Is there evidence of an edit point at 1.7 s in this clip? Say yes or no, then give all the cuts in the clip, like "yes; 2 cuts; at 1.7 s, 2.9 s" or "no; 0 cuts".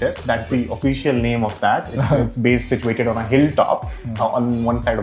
no; 0 cuts